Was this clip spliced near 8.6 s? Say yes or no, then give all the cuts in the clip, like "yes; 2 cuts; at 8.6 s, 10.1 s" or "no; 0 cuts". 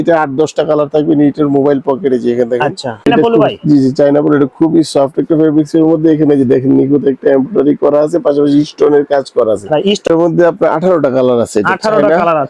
no; 2 cuts; at 3.1 s, 10.1 s